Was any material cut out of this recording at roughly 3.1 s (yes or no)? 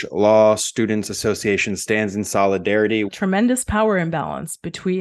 yes